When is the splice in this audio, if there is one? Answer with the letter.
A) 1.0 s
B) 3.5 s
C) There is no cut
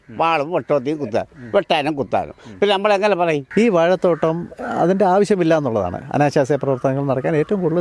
B